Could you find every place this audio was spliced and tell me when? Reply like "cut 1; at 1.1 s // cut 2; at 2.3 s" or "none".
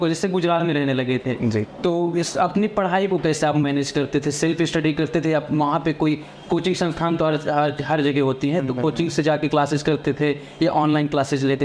none